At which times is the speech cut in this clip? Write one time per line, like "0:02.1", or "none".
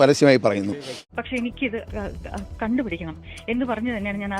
0:01.0